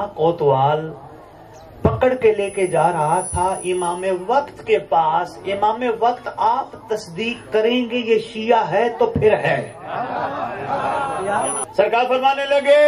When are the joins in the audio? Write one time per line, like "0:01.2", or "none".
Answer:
0:11.6